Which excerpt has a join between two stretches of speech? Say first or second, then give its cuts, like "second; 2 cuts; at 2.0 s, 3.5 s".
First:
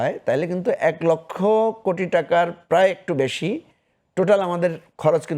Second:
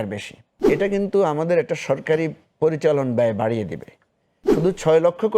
second; 2 cuts; at 0.7 s, 4.5 s